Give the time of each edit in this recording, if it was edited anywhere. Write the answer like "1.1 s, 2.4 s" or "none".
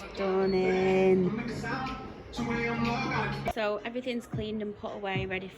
3.5 s